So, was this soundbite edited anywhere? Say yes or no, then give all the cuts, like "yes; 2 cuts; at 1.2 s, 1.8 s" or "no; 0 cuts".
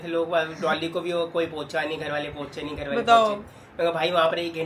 no; 0 cuts